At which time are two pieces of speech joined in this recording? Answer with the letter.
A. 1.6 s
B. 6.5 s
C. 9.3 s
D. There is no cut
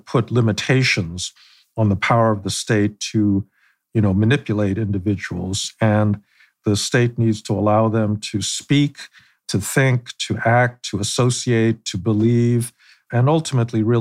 B